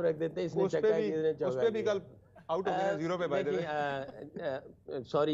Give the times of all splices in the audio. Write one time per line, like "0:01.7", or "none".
none